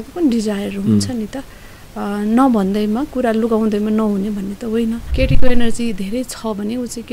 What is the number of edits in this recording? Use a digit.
1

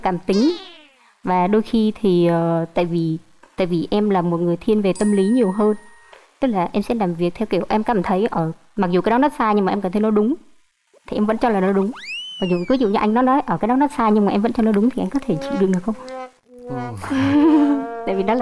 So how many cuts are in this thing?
0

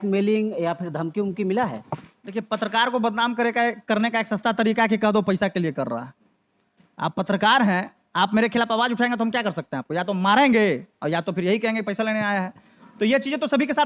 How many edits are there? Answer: 0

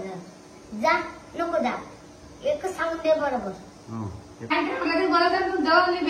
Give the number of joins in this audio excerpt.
1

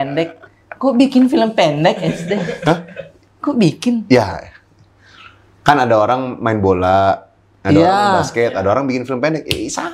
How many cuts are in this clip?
0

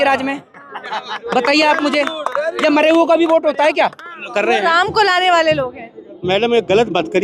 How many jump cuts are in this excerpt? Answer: 1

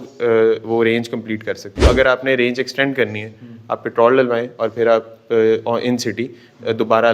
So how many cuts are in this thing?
1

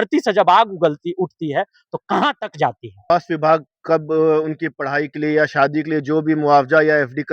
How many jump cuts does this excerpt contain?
1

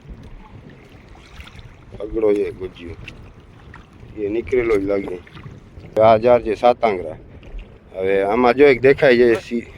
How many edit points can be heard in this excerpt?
1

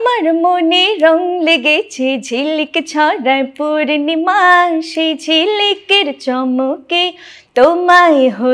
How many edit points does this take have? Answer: 0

